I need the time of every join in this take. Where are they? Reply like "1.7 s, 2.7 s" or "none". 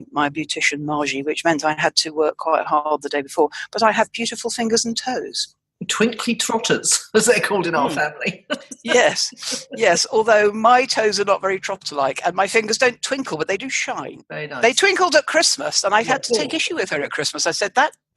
14.2 s